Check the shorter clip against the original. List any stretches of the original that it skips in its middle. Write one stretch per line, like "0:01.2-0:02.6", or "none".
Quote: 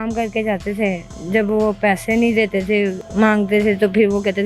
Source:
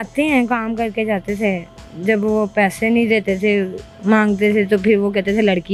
0:01.7-0:01.9
0:03.8-0:03.9